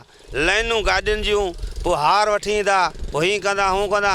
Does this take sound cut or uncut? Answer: uncut